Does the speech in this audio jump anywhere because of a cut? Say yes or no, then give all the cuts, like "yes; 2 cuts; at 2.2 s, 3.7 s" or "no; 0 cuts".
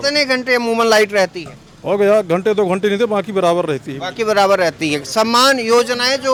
no; 0 cuts